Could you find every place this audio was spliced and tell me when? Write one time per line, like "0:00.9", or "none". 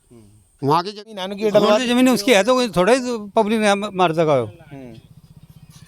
0:01.2